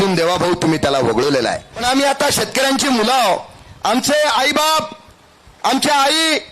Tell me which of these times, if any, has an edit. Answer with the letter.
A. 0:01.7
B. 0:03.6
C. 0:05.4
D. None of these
A